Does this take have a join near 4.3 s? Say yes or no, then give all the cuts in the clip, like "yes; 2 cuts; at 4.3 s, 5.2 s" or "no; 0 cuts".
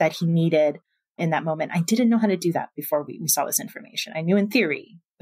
no; 0 cuts